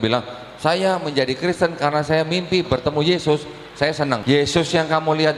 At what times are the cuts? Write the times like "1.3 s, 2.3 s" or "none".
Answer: 4.2 s